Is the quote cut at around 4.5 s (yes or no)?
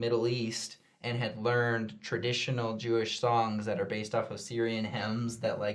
no